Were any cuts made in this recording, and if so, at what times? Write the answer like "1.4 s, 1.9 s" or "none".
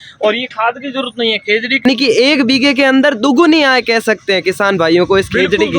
1.8 s